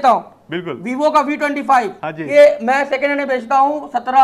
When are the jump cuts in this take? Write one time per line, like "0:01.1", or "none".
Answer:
0:02.1